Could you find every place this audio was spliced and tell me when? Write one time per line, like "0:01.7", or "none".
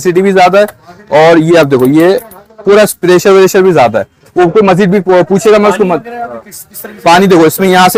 none